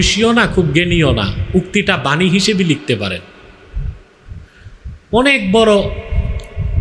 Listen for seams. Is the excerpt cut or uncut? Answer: uncut